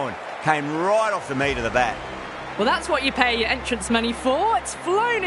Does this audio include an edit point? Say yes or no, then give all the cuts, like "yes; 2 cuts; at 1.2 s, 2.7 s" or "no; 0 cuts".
yes; 1 cut; at 2.5 s